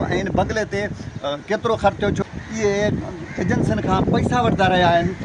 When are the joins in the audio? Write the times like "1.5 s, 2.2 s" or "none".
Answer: 2.2 s